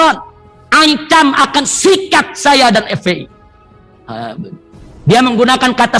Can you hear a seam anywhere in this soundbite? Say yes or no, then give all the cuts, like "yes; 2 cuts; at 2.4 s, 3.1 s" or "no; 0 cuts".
no; 0 cuts